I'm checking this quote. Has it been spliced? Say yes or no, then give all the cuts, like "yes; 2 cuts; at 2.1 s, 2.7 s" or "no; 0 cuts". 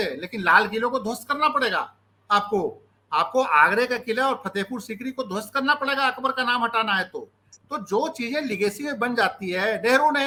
no; 0 cuts